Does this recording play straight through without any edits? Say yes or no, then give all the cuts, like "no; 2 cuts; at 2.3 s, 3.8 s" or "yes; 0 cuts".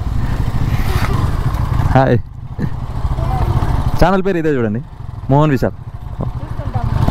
no; 1 cut; at 1.1 s